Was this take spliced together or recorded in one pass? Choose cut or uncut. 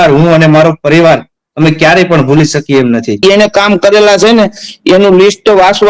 cut